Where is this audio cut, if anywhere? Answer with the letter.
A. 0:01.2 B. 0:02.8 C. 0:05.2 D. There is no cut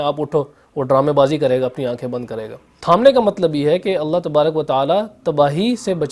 B